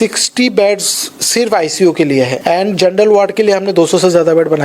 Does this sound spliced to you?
yes; 1 cut; at 2.4 s

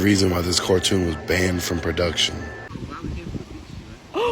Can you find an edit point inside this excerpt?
yes; 1 cut; at 2.7 s

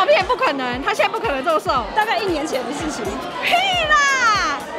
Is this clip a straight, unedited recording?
yes; 0 cuts

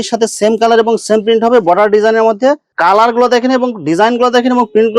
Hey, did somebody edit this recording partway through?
yes; 1 cut; at 2.7 s

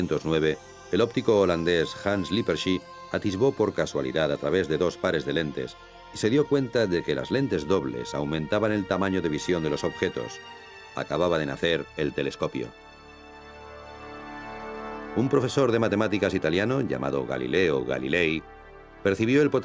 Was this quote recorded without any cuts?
yes; 0 cuts

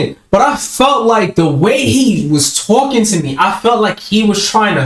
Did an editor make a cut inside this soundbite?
no; 0 cuts

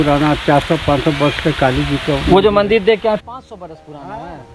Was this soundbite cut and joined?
no; 0 cuts

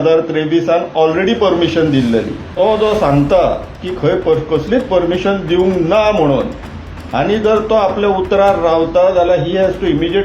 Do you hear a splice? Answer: yes; 1 cut; at 2.4 s

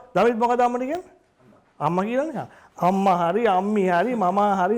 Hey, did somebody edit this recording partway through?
yes; 1 cut; at 2.6 s

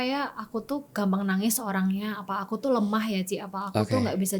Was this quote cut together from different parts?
no; 0 cuts

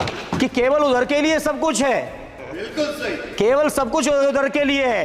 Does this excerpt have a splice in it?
no; 0 cuts

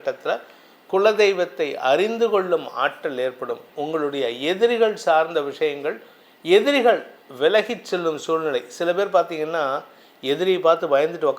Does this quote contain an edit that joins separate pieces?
yes; 1 cut; at 3.7 s

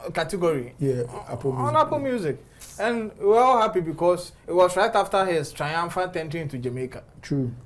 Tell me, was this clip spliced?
no; 0 cuts

